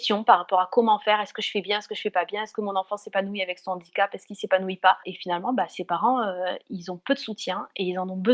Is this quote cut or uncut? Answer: uncut